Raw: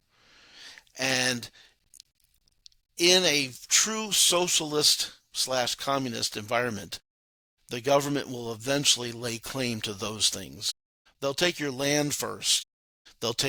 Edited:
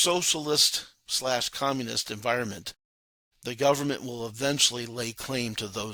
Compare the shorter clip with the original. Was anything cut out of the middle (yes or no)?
no